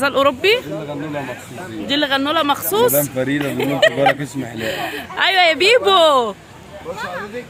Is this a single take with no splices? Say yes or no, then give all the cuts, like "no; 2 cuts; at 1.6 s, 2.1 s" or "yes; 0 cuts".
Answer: yes; 0 cuts